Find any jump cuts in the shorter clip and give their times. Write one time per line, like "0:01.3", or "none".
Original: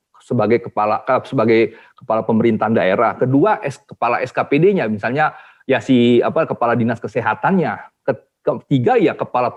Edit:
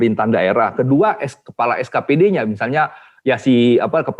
none